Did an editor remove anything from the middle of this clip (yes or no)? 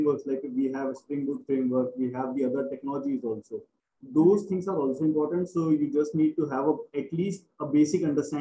no